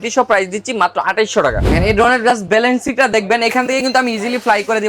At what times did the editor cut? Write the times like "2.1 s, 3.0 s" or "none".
1.6 s